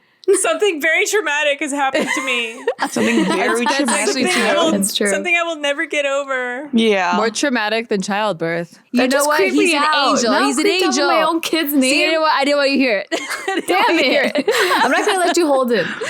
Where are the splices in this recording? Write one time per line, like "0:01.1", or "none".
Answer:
0:08.8
0:14.5